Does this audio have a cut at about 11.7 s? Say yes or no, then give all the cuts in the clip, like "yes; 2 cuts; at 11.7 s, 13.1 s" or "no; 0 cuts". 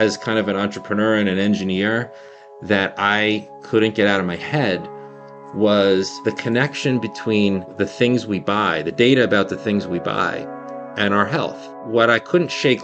yes; 3 cuts; at 6.1 s, 7.7 s, 11.7 s